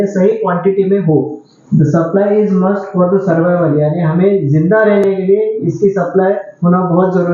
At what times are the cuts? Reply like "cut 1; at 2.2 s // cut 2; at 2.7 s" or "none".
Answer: cut 1; at 1.5 s